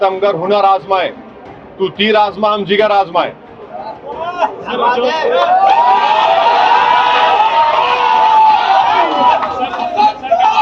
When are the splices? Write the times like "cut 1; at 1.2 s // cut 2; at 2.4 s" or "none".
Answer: none

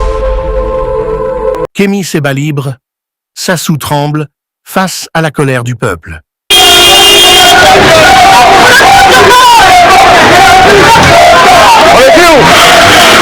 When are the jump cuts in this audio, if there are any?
cut 1; at 1.7 s

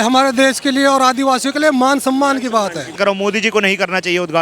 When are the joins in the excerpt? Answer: cut 1; at 2.8 s

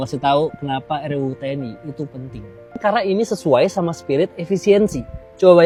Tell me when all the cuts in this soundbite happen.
none

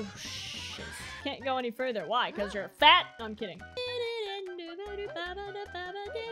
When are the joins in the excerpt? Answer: cut 1; at 1.3 s // cut 2; at 3.7 s

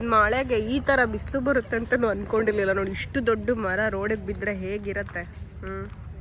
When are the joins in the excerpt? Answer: none

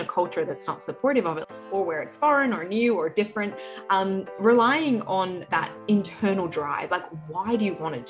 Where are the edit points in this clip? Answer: cut 1; at 1.4 s

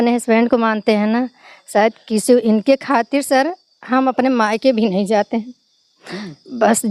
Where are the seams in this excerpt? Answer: none

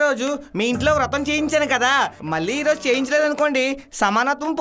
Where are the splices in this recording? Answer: none

